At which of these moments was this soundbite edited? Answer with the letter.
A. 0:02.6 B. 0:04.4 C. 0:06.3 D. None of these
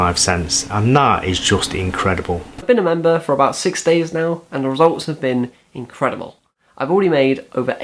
A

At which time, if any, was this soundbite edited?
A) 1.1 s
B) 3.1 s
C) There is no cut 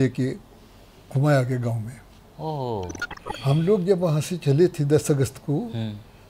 B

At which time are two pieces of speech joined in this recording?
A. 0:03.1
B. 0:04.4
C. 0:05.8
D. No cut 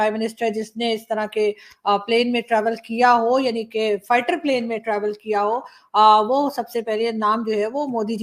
D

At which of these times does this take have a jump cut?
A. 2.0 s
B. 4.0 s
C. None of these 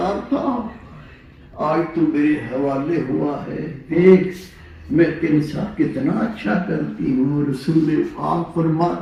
C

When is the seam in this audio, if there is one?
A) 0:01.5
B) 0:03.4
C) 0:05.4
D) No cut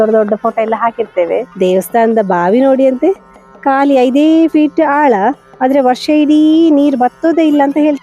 A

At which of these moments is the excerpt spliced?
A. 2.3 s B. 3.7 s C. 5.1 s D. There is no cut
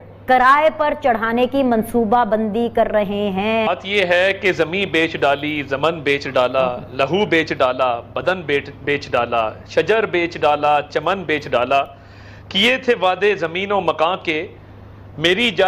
B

